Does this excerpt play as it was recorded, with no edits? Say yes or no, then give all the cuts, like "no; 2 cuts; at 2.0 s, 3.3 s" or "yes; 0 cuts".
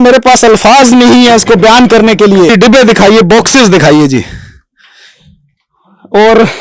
yes; 0 cuts